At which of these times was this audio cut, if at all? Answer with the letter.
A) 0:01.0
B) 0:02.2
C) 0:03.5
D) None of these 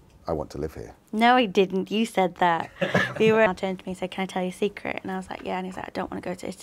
C